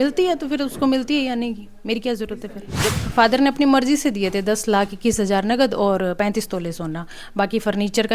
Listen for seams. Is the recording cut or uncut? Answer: cut